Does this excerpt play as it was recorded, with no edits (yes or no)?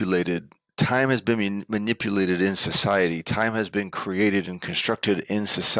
yes